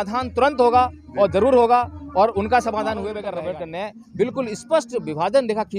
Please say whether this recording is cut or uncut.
cut